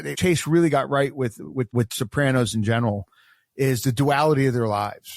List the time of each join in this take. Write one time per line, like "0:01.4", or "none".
0:01.7